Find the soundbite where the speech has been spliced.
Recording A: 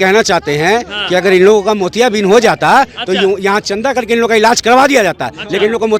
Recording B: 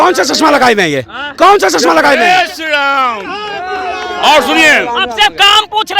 B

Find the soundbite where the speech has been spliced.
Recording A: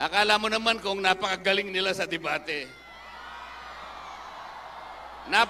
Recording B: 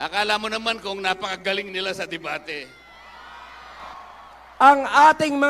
B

